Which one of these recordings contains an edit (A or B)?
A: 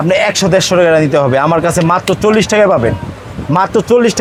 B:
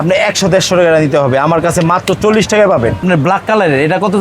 B